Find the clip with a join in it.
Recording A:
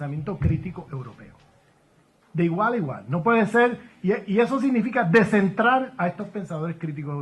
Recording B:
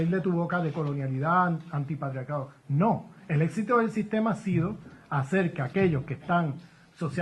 B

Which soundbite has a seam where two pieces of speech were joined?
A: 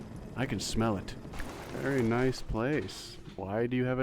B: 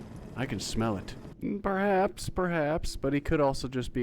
B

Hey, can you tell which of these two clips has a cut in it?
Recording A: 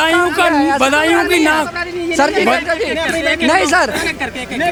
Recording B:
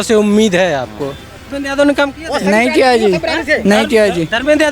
B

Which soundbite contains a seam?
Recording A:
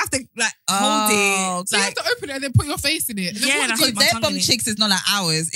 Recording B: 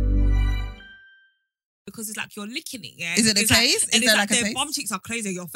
B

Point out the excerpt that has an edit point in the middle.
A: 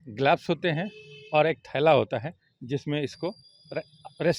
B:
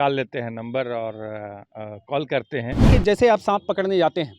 B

